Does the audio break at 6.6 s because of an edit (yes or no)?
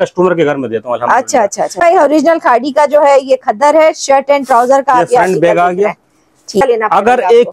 yes